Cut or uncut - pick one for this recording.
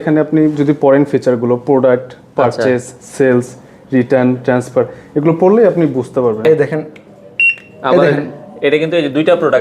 cut